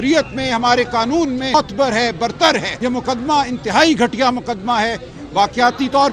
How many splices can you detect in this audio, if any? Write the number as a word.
two